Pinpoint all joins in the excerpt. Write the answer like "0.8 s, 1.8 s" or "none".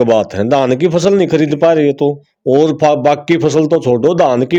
none